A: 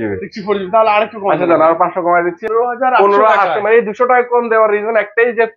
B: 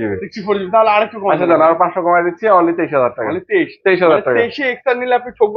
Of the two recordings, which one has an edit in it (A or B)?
A